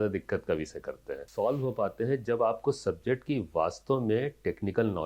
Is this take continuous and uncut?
no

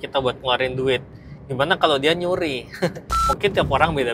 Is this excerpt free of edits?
no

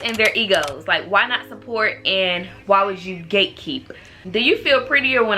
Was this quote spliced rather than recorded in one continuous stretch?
yes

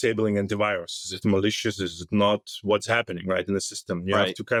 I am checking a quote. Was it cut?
no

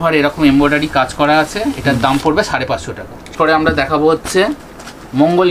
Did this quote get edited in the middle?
yes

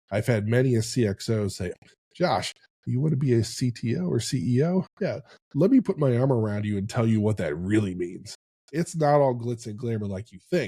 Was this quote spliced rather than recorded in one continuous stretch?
yes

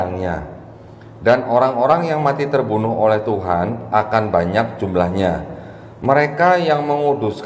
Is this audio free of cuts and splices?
yes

